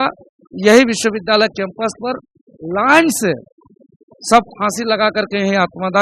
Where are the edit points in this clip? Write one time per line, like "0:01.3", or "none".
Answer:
none